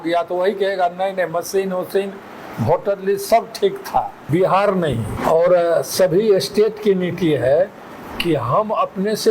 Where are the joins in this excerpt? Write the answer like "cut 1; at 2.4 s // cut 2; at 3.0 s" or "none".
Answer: cut 1; at 4.2 s // cut 2; at 5.1 s